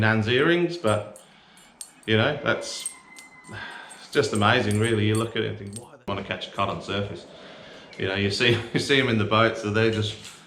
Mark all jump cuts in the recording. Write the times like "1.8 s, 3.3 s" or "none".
6.1 s